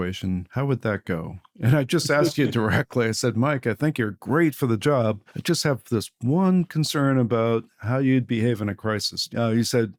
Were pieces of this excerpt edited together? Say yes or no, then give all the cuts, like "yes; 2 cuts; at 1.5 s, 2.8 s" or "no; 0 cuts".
no; 0 cuts